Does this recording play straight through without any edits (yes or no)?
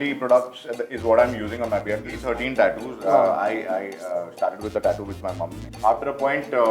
no